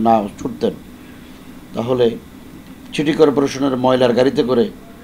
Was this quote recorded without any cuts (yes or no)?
yes